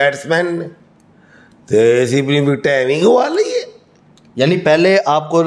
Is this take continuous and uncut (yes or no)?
yes